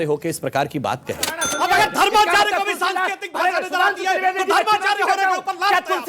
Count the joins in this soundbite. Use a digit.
1